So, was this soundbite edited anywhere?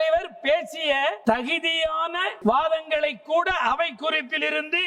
yes; 2 cuts; at 1.2 s, 2.3 s

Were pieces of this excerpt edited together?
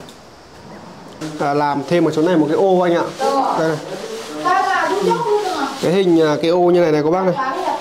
yes; 1 cut; at 1.2 s

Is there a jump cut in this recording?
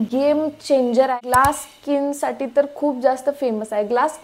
yes; 1 cut; at 1.2 s

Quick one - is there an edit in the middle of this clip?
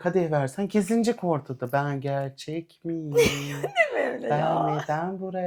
no; 0 cuts

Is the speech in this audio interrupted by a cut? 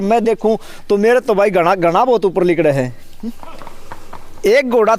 no; 0 cuts

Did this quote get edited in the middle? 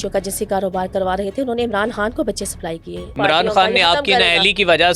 yes; 1 cut; at 3.1 s

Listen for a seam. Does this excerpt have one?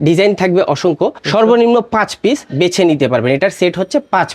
yes; 1 cut; at 1.2 s

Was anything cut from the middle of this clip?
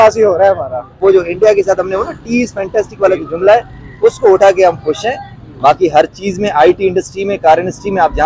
yes; 1 cut; at 1.0 s

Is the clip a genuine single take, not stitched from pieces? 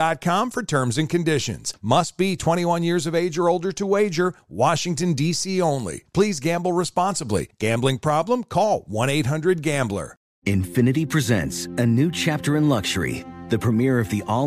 no; 1 cut; at 10.3 s

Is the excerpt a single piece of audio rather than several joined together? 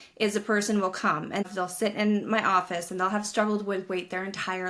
no; 1 cut; at 1.5 s

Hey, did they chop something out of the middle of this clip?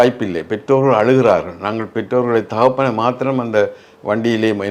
no; 0 cuts

